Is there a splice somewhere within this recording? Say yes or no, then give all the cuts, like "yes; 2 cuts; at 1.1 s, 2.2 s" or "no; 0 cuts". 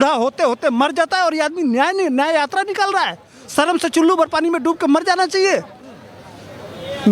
no; 0 cuts